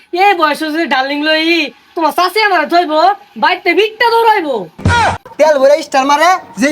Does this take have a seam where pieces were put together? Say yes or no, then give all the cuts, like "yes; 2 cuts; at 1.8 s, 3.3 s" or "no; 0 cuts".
yes; 1 cut; at 5.0 s